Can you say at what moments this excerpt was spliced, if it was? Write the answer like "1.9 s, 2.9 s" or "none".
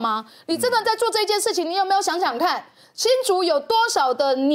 none